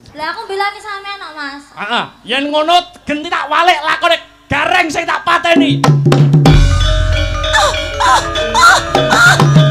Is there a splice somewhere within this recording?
no; 0 cuts

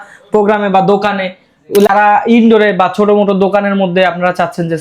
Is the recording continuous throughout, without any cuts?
no; 1 cut; at 1.9 s

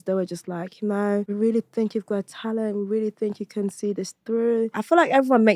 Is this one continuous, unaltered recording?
no; 2 cuts; at 1.3 s, 4.8 s

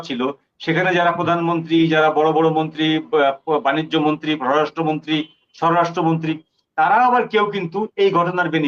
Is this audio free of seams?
yes; 0 cuts

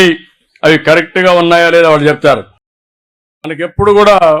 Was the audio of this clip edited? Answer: yes; 1 cut; at 3.0 s

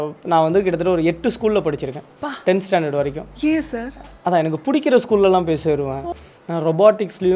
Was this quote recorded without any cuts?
no; 1 cut; at 6.2 s

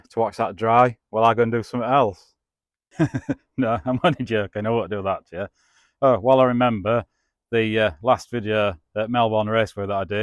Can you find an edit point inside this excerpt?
no; 0 cuts

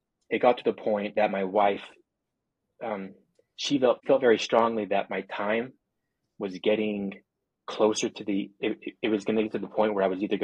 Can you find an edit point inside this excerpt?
yes; 1 cut; at 1.1 s

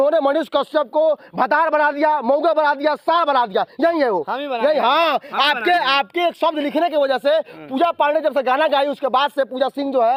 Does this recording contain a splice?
no; 0 cuts

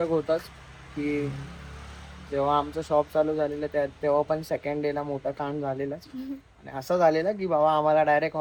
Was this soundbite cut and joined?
no; 0 cuts

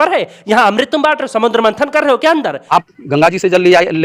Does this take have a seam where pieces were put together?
yes; 1 cut; at 2.6 s

